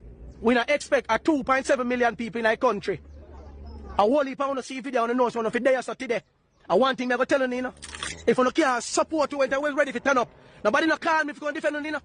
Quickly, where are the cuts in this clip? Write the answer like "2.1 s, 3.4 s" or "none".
none